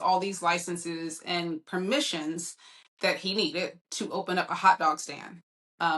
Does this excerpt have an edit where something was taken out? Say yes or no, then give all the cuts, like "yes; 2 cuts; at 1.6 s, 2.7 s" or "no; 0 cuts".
no; 0 cuts